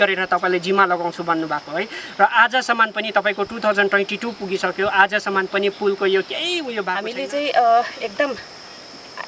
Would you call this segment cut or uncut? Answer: cut